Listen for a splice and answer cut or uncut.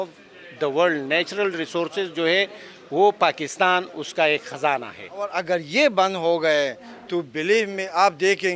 cut